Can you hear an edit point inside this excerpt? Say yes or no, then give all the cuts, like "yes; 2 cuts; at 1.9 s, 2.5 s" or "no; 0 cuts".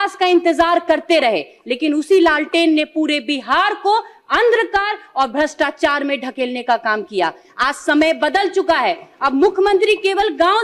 no; 0 cuts